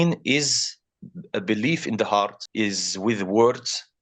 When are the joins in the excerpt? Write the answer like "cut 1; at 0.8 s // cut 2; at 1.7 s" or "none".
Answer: cut 1; at 2.4 s